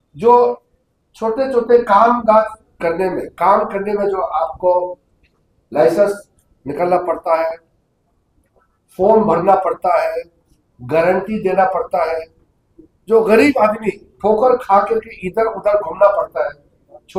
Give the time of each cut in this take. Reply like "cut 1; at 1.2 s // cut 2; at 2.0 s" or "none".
none